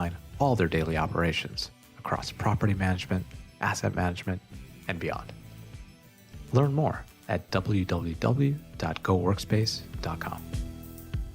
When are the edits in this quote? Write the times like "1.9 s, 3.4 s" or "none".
10.4 s